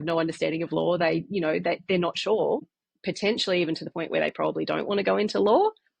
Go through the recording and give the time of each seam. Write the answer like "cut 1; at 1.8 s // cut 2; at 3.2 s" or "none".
cut 1; at 2.7 s